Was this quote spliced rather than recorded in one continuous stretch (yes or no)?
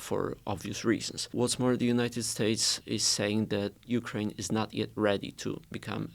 yes